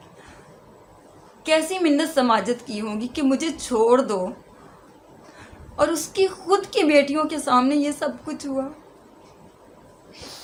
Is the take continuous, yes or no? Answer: yes